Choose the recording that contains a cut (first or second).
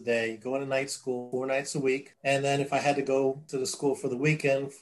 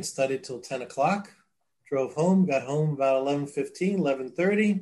first